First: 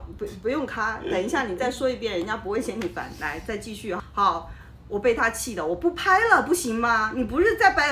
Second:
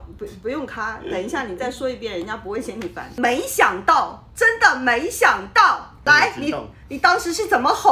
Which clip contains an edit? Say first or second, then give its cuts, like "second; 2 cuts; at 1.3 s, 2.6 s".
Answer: second; 2 cuts; at 3.0 s, 5.9 s